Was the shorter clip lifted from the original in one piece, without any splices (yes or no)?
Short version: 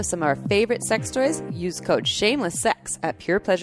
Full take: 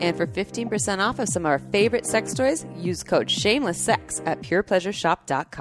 yes